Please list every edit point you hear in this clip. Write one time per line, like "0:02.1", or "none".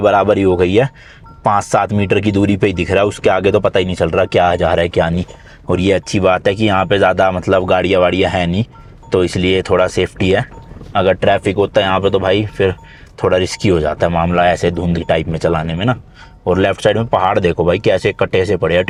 none

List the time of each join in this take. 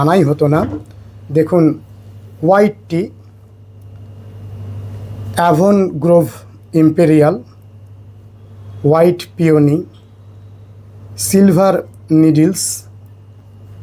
none

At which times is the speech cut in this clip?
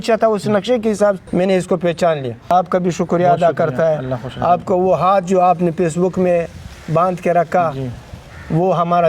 0:01.2
0:02.5

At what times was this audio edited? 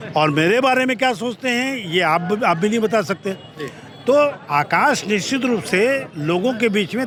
none

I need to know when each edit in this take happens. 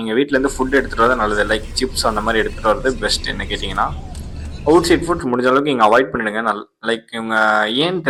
none

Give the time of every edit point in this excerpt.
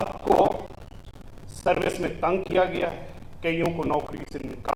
none

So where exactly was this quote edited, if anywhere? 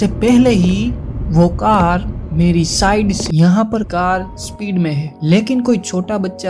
0:03.2
0:03.9

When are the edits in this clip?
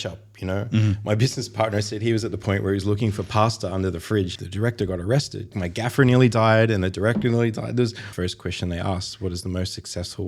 0:04.3
0:05.5
0:08.1

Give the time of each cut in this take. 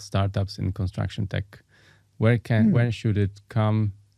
none

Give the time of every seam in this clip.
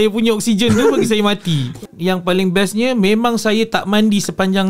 0:01.8

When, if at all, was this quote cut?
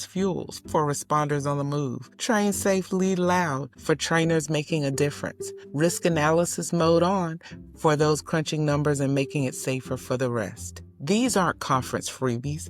0:03.7

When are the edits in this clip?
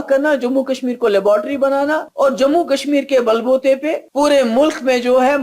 0:02.1
0:04.0

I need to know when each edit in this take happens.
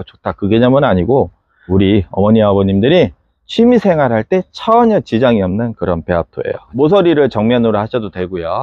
0:06.7

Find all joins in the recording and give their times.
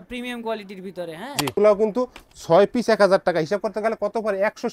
0:01.5

